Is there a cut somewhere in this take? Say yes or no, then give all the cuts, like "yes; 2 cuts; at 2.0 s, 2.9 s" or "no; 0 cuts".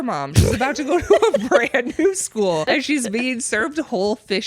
yes; 1 cut; at 2.6 s